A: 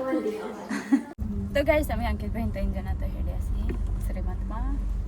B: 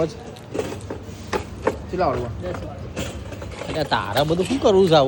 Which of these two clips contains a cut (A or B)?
A